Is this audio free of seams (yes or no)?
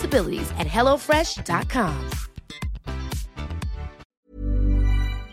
no